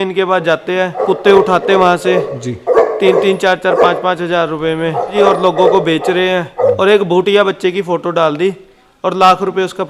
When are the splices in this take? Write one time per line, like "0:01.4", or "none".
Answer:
0:01.0
0:05.1
0:06.8